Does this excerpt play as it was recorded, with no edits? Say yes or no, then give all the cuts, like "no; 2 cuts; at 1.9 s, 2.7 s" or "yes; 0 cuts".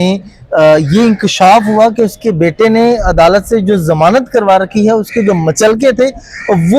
yes; 0 cuts